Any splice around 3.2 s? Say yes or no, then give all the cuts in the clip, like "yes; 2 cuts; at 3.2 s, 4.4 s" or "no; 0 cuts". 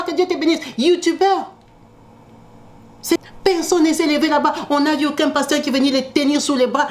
yes; 1 cut; at 3.2 s